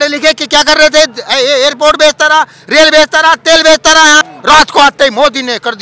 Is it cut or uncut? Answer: cut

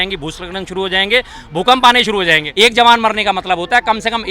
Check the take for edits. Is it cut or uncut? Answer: cut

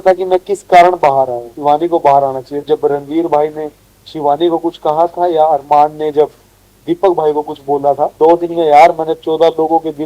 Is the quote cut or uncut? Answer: cut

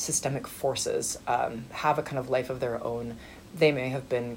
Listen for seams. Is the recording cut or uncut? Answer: uncut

